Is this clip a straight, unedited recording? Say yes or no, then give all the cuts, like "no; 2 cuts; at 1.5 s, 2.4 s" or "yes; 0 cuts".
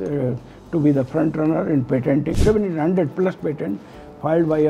no; 1 cut; at 2.4 s